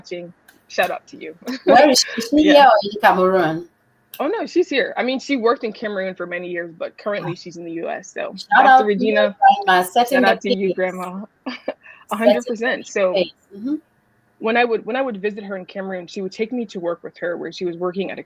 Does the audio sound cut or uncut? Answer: uncut